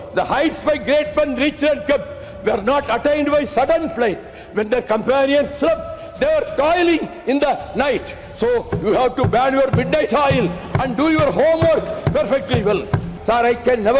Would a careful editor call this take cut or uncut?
cut